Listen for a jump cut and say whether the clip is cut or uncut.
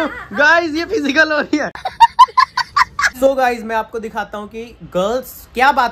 uncut